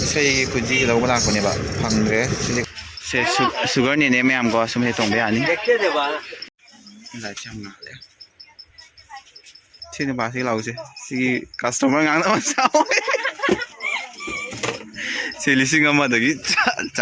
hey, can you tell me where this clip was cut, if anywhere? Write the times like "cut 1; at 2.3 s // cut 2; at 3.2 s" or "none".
cut 1; at 2.7 s // cut 2; at 6.5 s // cut 3; at 9.8 s